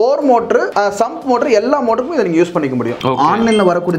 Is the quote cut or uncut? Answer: cut